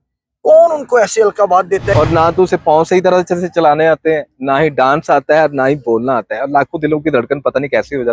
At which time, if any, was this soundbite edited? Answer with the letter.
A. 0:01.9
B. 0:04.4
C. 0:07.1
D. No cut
A